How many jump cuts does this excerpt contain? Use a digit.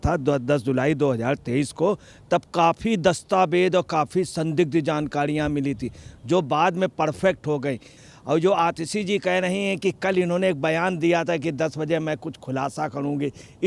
1